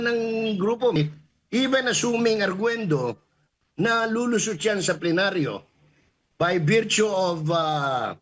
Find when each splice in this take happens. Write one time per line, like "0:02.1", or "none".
0:01.0